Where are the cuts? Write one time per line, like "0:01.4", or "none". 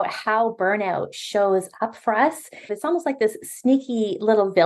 0:02.7